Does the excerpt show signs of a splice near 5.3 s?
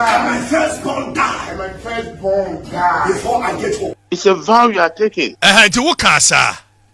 yes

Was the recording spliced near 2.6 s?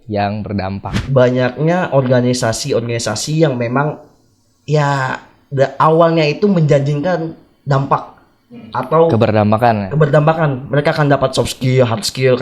no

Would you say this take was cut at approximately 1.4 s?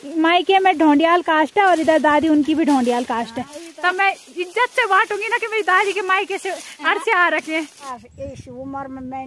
no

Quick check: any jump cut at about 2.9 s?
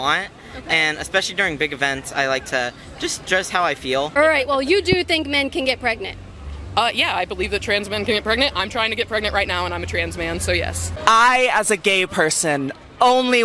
no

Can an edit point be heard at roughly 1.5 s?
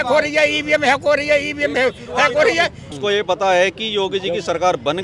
no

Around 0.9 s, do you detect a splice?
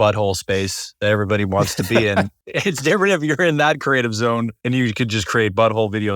no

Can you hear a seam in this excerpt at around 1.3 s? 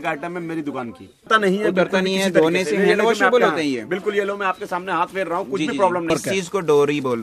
yes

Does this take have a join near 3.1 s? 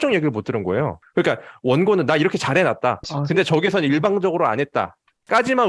yes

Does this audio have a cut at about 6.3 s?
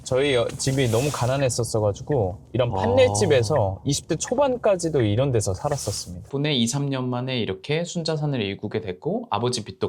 yes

